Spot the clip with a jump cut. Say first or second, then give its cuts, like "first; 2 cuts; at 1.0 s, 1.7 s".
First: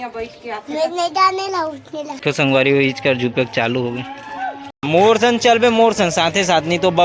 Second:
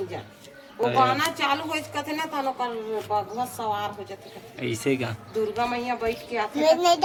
first; 2 cuts; at 2.2 s, 4.7 s